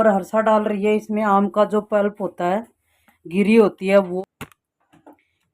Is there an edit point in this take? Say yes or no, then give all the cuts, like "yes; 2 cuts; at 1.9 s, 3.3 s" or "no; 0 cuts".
yes; 1 cut; at 4.1 s